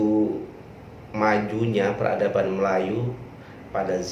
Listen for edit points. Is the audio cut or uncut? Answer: uncut